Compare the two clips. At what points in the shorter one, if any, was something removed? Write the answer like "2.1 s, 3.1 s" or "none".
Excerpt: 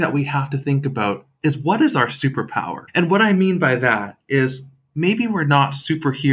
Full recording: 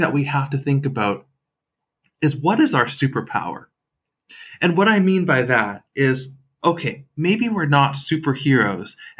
1.3 s, 2.8 s, 4.8 s